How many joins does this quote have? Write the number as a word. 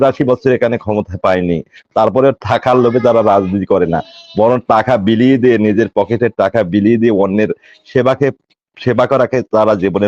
zero